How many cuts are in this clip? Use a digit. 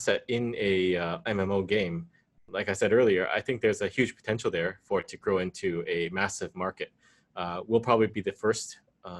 0